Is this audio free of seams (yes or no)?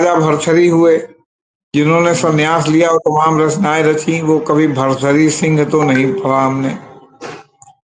yes